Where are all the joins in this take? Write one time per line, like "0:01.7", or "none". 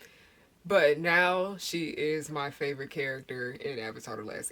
none